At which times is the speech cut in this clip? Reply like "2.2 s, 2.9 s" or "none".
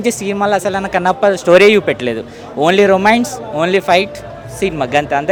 none